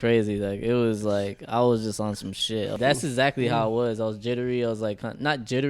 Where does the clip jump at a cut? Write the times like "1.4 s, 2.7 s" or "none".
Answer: 2.8 s